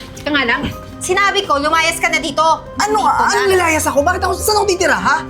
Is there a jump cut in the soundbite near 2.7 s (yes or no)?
yes